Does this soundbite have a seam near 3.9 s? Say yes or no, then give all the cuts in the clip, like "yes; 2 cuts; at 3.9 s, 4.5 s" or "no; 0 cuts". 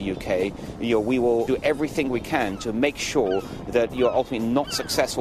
no; 2 cuts; at 1.5 s, 2.6 s